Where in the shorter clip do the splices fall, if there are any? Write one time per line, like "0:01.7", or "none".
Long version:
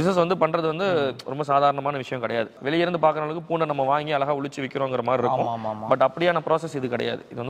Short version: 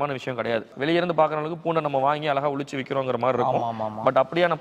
none